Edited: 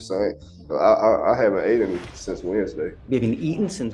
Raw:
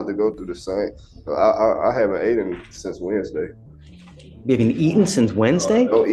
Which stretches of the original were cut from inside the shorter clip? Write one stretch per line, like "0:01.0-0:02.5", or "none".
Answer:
0:03.5-0:04.3